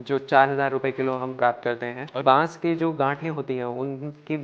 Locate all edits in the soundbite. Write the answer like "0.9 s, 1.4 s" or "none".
2.2 s

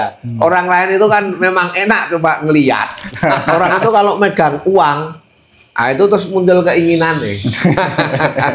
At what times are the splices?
3.4 s

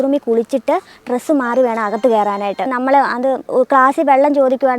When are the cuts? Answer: none

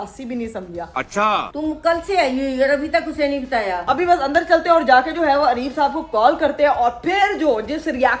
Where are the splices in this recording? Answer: 1.4 s, 3.8 s

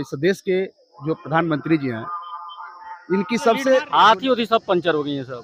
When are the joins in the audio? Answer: 3.9 s

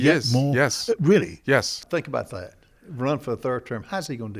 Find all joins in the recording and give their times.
1.7 s

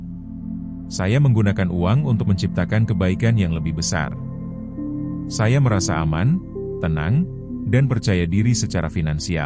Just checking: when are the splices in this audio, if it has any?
4.4 s, 5.4 s

